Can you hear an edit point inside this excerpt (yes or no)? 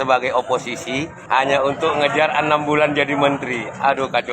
yes